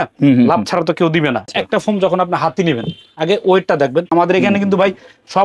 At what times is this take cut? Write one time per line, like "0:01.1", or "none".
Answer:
0:01.5
0:04.1